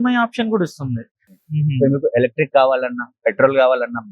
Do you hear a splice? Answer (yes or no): yes